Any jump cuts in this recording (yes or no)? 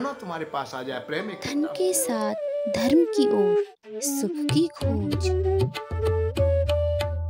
yes